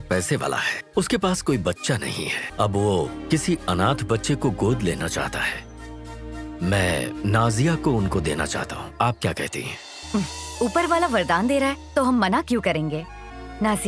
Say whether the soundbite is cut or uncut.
cut